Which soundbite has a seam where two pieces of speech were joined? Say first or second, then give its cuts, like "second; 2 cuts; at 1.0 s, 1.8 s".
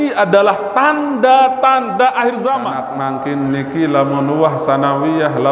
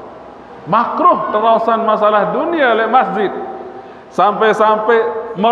first; 1 cut; at 2.9 s